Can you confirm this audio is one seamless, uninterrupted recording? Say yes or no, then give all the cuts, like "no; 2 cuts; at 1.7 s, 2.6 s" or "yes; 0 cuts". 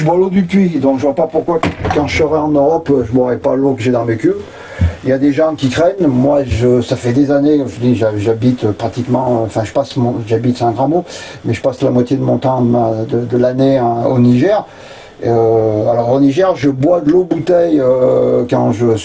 yes; 0 cuts